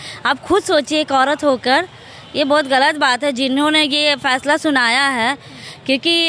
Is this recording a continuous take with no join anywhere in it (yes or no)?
yes